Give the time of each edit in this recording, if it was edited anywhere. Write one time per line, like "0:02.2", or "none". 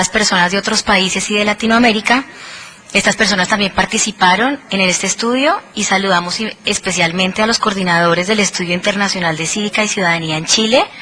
0:06.6